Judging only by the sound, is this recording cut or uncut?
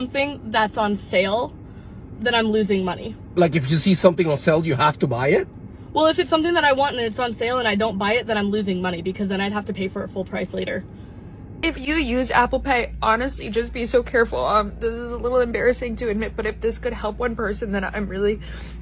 cut